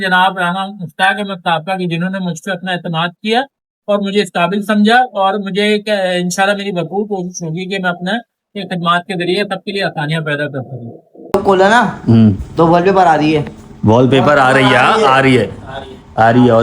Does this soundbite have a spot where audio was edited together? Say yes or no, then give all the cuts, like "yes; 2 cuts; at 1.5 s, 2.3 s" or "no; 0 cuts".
yes; 1 cut; at 11.3 s